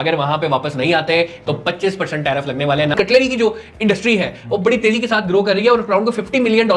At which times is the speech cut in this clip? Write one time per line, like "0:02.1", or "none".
0:02.9